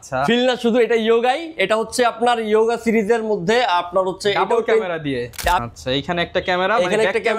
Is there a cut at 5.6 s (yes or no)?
yes